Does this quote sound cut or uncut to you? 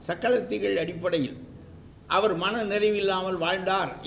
uncut